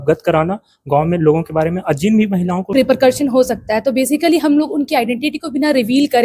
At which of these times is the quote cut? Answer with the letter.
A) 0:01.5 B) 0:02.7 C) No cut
B